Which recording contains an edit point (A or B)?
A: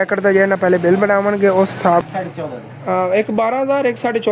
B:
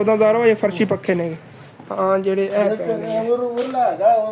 A